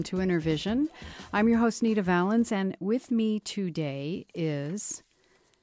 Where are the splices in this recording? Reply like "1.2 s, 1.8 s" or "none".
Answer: none